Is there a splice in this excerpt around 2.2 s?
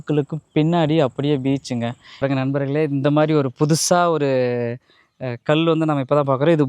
yes; 1 cut; at 2.2 s

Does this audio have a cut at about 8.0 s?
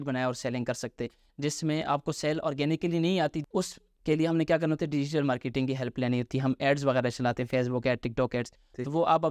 no; 1 cut; at 3.4 s

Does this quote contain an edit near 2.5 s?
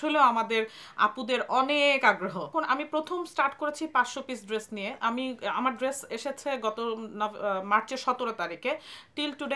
yes; 1 cut; at 2.5 s

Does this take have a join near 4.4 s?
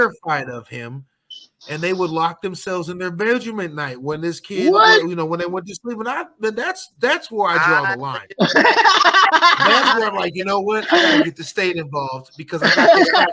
no; 0 cuts

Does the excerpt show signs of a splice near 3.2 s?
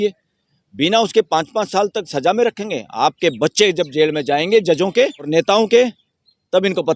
no; 1 cut; at 5.3 s

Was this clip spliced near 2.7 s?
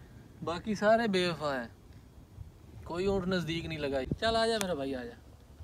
no; 1 cut; at 4.1 s

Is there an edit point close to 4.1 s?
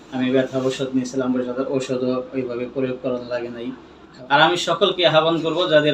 yes; 1 cut; at 4.1 s

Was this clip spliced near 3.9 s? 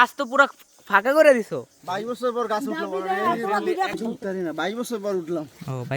yes; 1 cut; at 3.9 s

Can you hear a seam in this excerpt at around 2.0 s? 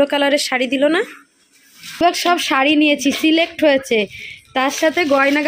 yes; 1 cut; at 2.0 s

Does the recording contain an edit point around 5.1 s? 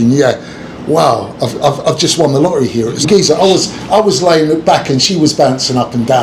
no; 1 cut; at 3.0 s

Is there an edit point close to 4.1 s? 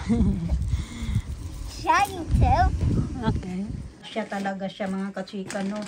yes; 1 cut; at 4.1 s

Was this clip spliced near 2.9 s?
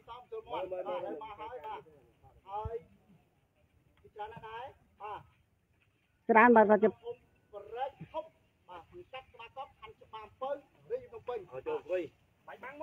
no; 0 cuts

